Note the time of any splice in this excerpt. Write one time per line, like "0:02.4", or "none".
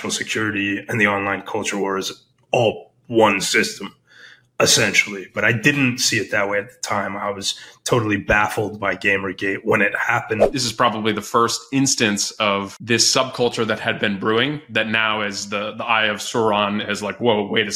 0:10.5
0:12.7